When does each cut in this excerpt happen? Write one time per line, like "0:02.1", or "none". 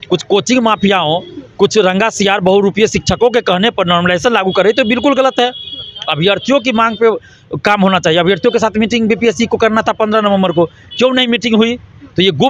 none